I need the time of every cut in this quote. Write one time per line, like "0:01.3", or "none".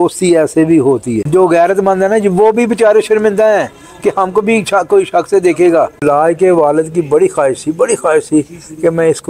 0:01.2
0:06.0